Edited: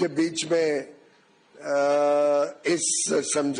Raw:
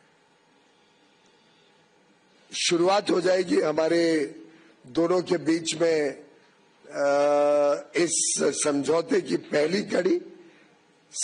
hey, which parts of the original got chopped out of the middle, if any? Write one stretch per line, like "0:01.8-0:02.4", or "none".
none